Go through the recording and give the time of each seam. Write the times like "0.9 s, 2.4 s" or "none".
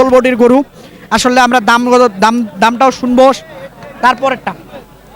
none